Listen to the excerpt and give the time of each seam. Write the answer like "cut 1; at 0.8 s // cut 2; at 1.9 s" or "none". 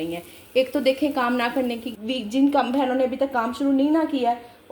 cut 1; at 1.9 s